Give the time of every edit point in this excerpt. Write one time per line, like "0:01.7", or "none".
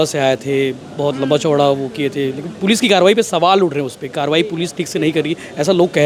none

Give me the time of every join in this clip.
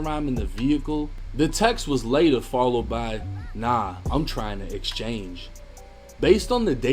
0:01.2

